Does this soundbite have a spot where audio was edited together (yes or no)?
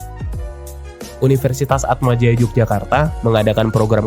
yes